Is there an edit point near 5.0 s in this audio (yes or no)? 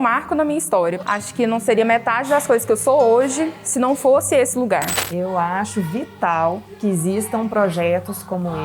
yes